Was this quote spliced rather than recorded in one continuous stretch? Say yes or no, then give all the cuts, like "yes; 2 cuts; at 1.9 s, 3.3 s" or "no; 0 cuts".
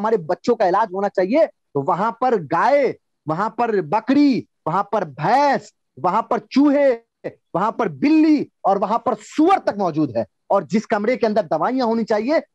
no; 0 cuts